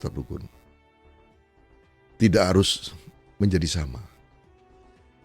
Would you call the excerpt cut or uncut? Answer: uncut